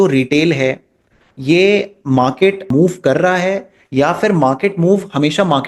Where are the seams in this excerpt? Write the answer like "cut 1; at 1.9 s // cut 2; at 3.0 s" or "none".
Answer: cut 1; at 2.7 s